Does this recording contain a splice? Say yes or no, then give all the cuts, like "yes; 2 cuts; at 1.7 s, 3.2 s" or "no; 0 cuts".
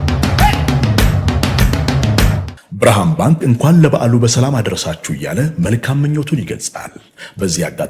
yes; 1 cut; at 2.5 s